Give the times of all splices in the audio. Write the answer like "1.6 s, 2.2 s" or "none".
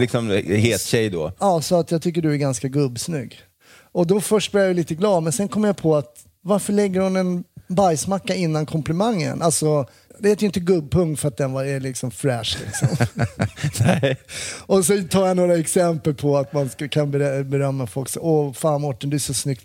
10.0 s